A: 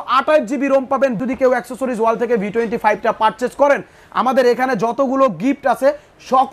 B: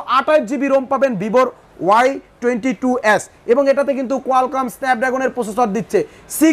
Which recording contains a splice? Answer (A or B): A